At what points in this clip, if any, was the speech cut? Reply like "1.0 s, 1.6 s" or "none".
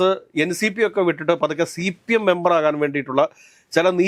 none